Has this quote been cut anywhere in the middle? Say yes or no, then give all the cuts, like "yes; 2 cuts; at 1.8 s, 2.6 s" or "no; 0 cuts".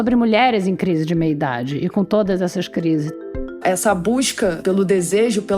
yes; 2 cuts; at 3.4 s, 4.6 s